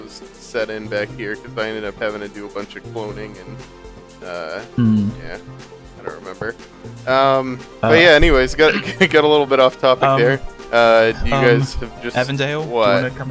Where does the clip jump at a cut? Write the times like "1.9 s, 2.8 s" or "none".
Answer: 9.5 s